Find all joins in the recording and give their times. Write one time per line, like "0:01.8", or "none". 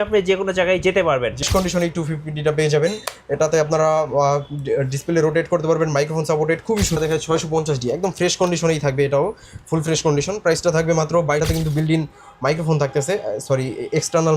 0:01.4
0:07.0
0:11.4

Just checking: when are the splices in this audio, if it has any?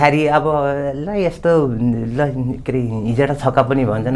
none

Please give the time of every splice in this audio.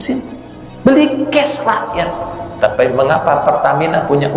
none

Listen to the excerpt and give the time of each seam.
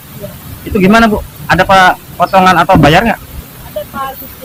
none

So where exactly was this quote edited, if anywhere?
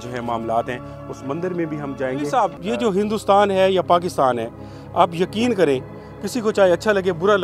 0:02.3

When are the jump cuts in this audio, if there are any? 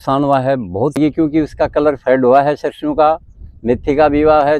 0:01.0

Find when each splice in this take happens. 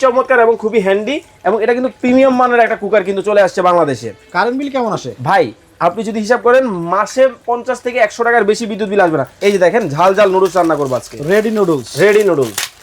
0:09.3

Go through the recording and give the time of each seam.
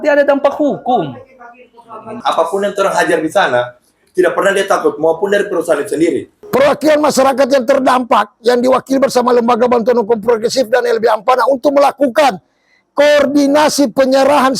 0:02.2
0:06.3

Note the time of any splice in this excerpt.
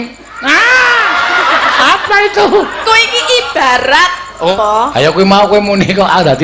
0:04.5

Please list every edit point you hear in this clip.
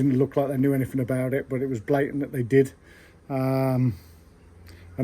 none

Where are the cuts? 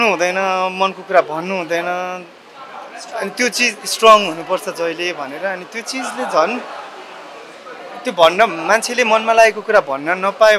none

